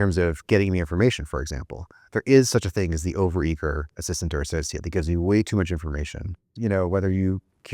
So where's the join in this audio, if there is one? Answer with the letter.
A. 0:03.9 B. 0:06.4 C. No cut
B